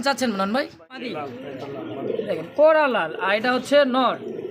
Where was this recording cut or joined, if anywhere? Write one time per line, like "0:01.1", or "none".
0:01.1